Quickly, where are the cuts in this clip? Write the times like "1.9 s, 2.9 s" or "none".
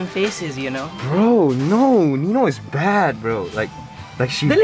none